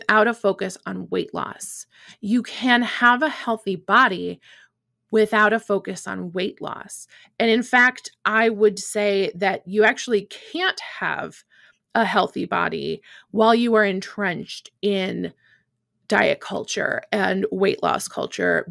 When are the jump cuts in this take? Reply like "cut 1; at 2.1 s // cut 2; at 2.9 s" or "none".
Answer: none